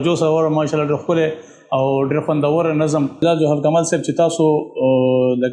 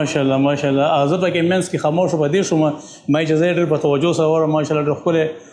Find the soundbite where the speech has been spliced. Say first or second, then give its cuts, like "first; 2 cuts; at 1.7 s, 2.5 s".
first; 1 cut; at 3.2 s